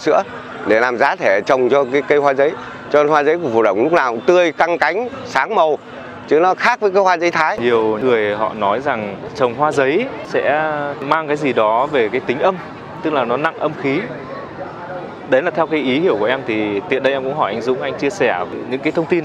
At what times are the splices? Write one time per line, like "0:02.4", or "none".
0:07.9
0:09.3
0:10.4
0:18.5